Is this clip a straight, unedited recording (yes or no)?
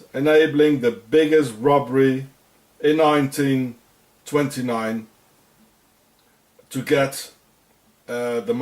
no